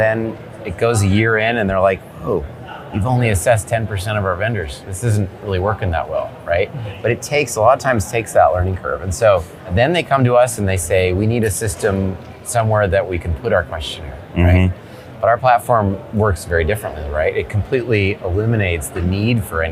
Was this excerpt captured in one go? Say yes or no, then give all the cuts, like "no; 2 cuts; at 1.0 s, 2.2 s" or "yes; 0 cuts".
yes; 0 cuts